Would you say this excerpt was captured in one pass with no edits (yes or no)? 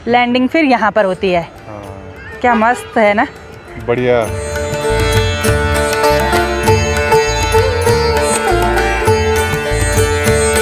yes